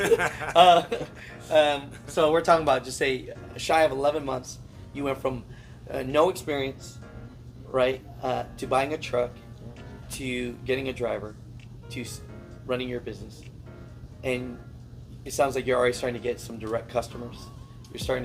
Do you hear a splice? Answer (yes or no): no